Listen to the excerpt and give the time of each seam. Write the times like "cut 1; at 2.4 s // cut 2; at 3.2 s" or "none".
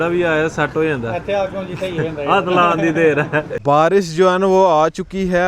cut 1; at 3.5 s